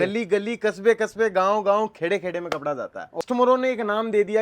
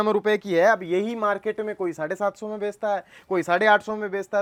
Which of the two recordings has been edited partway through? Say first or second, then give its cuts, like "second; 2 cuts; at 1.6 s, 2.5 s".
first; 1 cut; at 3.2 s